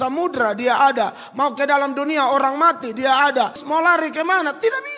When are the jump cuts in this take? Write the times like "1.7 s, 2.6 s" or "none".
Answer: 3.6 s